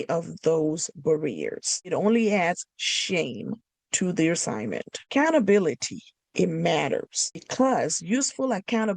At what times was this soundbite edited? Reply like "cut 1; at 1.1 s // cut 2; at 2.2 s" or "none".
cut 1; at 1.9 s // cut 2; at 5.1 s // cut 3; at 7.5 s